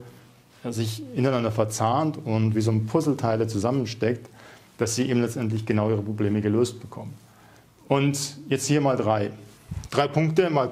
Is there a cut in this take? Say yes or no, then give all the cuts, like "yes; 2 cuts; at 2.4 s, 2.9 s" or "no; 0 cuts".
no; 0 cuts